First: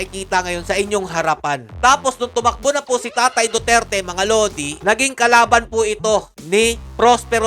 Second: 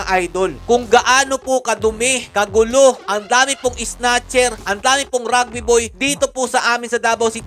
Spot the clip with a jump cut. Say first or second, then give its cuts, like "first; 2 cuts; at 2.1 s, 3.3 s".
first; 1 cut; at 1.7 s